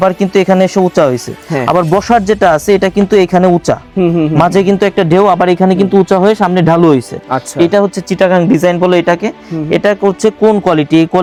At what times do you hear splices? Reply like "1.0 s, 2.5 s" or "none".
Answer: none